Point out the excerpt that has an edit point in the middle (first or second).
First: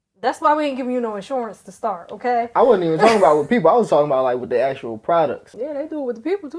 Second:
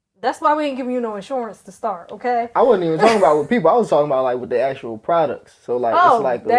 first